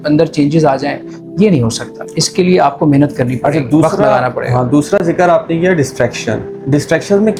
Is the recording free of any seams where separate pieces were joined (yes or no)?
yes